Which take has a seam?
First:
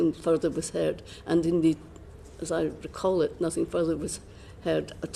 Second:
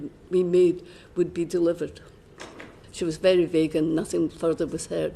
second; 1 cut; at 2.8 s

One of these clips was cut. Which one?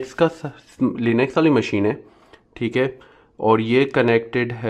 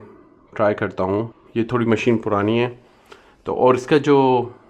second; 1 cut; at 1.4 s

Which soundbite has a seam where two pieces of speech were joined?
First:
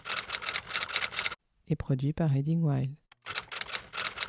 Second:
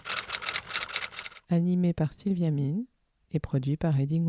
first; 2 cuts; at 1.3 s, 3.1 s

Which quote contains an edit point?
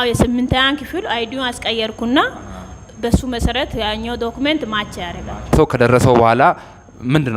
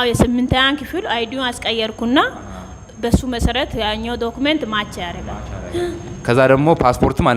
first; 1 cut; at 5.5 s

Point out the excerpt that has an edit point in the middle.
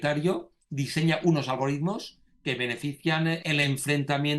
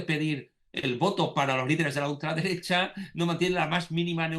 first; 1 cut; at 3.4 s

